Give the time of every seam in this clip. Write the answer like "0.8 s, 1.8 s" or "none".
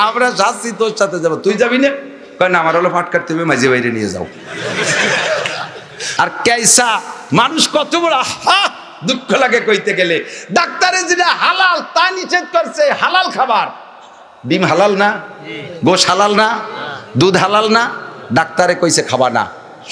6.1 s